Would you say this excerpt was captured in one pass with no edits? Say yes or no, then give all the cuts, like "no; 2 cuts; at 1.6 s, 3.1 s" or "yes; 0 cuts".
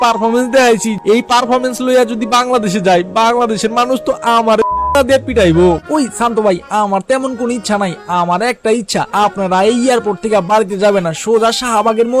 no; 2 cuts; at 0.9 s, 5.8 s